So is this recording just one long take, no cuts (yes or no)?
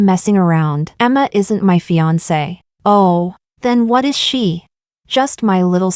yes